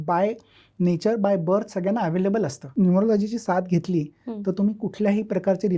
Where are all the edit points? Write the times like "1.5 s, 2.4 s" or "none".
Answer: 2.6 s